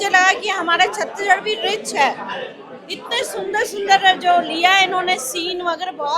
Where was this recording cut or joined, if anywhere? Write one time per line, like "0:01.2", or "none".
none